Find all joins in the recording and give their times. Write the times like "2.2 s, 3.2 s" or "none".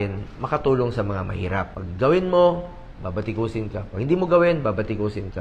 1.8 s